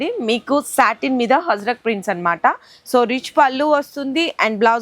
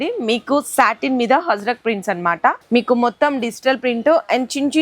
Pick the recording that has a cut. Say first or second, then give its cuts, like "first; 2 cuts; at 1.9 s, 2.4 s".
second; 1 cut; at 2.6 s